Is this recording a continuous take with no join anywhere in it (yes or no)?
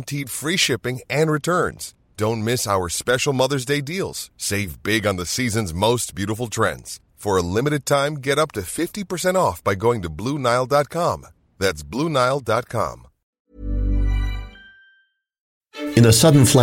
no